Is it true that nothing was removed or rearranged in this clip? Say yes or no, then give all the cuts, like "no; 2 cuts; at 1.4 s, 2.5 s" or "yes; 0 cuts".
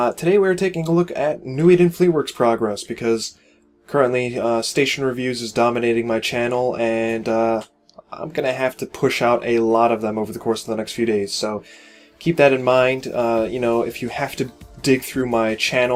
yes; 0 cuts